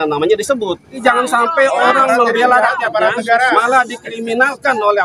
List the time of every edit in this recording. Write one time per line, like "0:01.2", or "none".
0:01.0